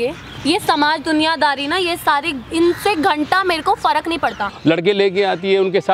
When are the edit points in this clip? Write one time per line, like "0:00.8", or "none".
0:04.5